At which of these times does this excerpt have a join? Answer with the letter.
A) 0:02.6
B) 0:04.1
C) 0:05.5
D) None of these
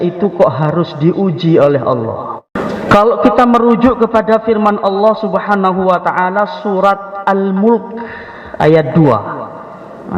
A